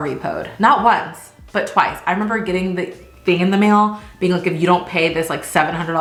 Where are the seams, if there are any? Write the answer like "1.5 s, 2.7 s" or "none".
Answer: none